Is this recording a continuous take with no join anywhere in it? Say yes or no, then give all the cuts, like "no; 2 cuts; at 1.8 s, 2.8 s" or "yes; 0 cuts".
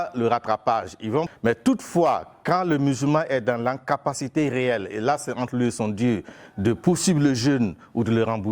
no; 1 cut; at 1.3 s